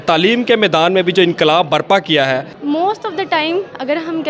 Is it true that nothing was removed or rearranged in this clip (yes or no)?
no